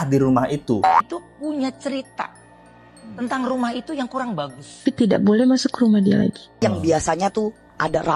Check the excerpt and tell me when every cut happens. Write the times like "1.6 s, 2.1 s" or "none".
1.1 s, 4.8 s, 6.6 s